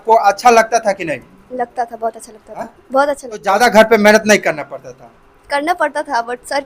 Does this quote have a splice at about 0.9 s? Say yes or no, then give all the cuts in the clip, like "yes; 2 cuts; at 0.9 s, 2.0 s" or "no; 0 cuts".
no; 1 cut; at 3.4 s